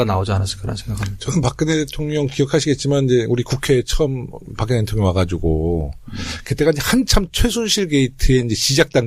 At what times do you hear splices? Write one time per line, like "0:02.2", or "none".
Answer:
0:08.0

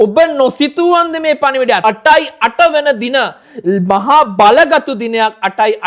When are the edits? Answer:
0:01.8

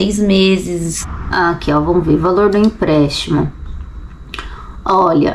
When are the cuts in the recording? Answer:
0:01.0

